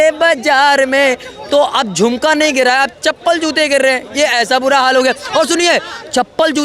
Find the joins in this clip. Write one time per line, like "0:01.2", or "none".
none